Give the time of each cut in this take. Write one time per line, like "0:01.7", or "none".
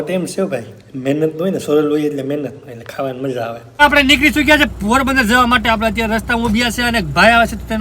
0:03.8